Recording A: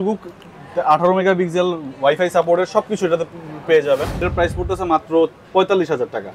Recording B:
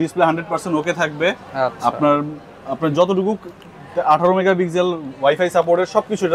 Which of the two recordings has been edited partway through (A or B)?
A